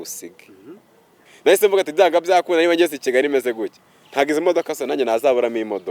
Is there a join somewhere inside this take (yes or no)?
yes